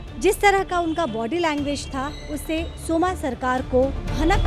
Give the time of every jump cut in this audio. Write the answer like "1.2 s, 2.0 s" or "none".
none